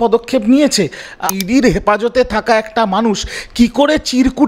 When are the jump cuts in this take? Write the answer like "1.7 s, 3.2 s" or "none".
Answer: 1.3 s